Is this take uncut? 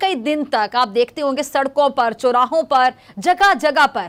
yes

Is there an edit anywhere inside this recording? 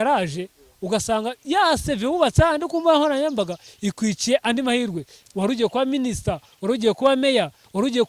no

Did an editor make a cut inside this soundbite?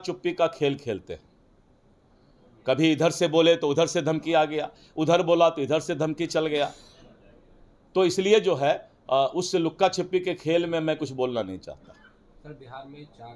no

